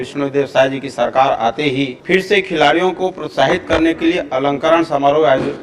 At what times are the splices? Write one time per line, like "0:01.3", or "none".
0:02.0